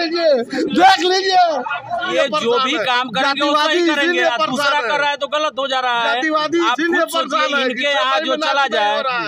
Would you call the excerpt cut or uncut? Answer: cut